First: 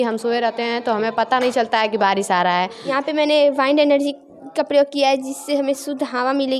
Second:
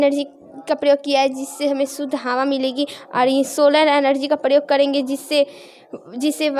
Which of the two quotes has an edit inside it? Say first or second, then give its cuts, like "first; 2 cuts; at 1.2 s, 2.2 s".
first; 1 cut; at 2.8 s